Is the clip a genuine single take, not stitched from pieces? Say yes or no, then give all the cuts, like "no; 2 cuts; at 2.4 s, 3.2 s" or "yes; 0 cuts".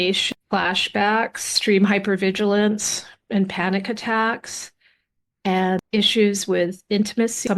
no; 1 cut; at 1.5 s